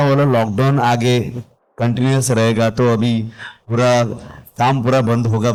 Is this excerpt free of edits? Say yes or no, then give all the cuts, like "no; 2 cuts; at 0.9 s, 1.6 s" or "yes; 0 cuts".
yes; 0 cuts